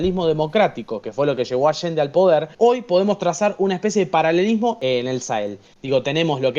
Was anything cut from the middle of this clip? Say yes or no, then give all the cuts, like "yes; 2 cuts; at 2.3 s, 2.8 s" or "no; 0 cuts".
yes; 2 cuts; at 2.5 s, 4.8 s